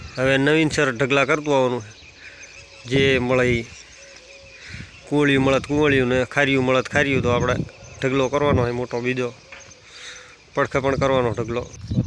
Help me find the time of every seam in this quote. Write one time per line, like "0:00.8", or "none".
none